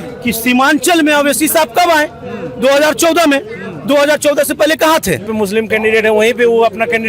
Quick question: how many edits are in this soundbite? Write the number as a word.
one